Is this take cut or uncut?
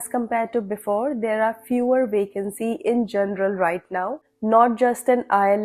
uncut